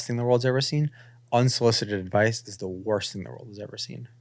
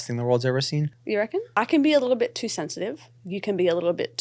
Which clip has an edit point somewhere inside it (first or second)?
second